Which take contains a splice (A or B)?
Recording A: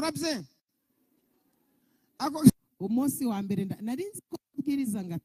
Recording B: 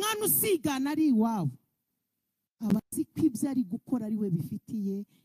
A